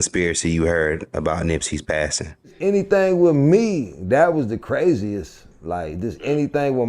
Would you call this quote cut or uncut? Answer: cut